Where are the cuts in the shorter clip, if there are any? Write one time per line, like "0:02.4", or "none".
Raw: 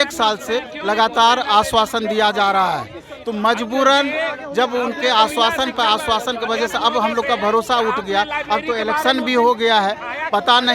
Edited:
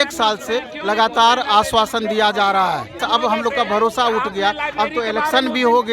0:03.0